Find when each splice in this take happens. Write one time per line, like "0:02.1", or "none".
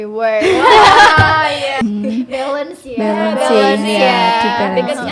0:01.8